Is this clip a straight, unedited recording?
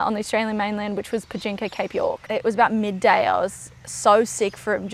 no; 1 cut; at 2.2 s

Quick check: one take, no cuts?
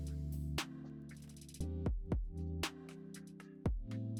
yes; 0 cuts

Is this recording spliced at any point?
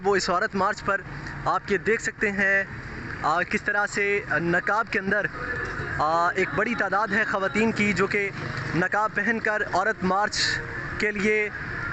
no; 0 cuts

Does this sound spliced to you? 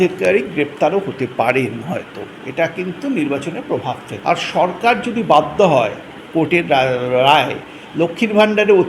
yes; 1 cut; at 4.1 s

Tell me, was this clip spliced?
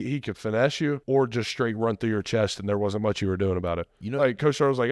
yes; 1 cut; at 1.0 s

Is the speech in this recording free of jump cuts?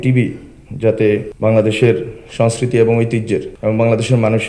no; 2 cuts; at 1.3 s, 3.5 s

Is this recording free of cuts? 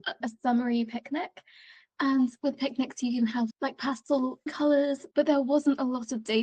yes; 0 cuts

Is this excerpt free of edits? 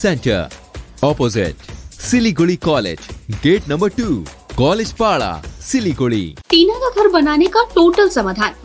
no; 1 cut; at 6.4 s

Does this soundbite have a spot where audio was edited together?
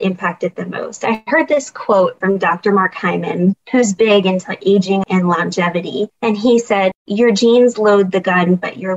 yes; 5 cuts; at 2.2 s, 3.6 s, 5.0 s, 6.1 s, 6.9 s

